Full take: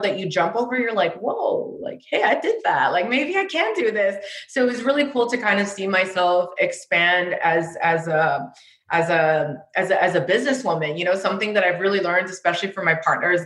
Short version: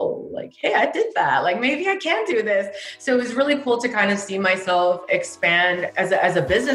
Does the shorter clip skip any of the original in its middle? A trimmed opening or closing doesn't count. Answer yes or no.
yes